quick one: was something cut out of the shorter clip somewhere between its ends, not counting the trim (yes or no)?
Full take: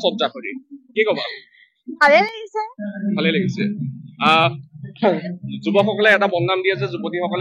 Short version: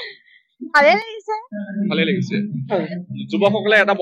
yes